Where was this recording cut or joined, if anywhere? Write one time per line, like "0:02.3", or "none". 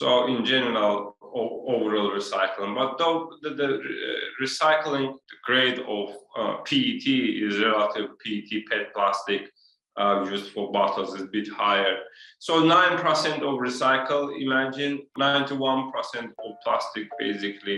none